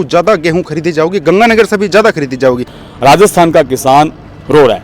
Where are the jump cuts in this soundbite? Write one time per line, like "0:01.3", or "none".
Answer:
0:02.7